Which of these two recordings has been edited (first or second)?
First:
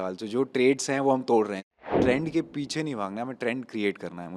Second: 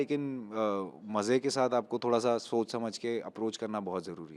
first